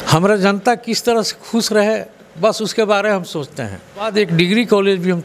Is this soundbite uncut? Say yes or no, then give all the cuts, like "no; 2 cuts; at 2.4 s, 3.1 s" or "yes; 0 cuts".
no; 1 cut; at 4.1 s